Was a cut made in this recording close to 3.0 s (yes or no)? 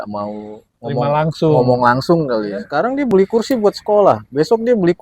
yes